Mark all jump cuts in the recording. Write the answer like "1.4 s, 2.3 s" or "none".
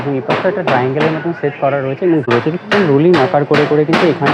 2.3 s